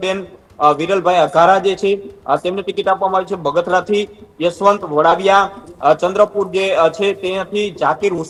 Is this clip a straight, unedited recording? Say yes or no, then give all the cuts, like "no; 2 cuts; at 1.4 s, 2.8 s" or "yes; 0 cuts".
yes; 0 cuts